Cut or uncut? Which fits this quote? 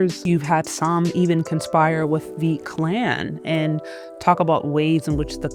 uncut